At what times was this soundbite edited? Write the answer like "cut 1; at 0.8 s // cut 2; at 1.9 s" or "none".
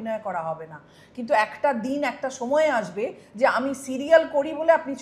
none